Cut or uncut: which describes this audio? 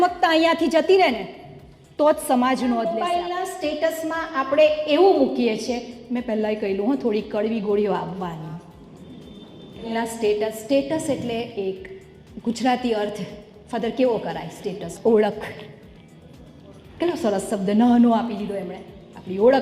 cut